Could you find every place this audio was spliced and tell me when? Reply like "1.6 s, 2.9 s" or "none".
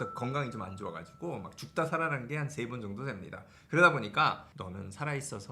4.5 s